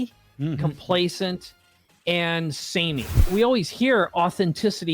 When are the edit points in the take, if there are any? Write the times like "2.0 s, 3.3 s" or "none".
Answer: 3.3 s

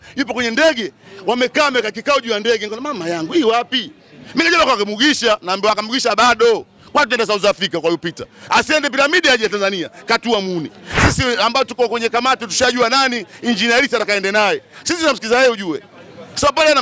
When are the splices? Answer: 11.0 s

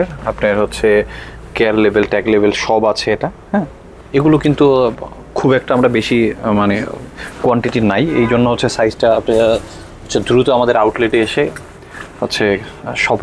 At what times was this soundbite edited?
none

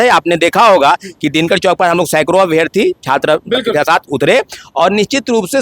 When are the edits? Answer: none

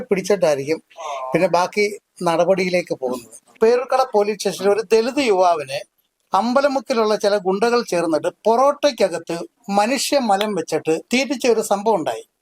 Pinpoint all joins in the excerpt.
3.5 s

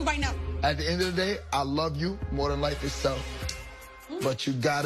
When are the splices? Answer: 1.9 s

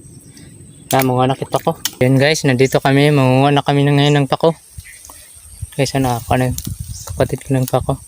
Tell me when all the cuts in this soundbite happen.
2.1 s

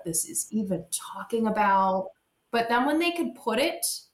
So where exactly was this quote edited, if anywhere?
2.1 s

